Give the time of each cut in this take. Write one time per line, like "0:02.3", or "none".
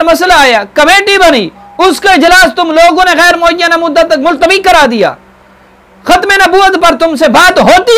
none